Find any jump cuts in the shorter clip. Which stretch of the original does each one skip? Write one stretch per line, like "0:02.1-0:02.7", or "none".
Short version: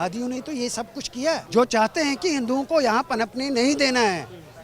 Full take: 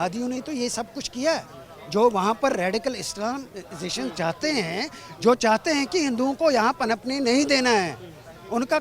0:01.4-0:05.1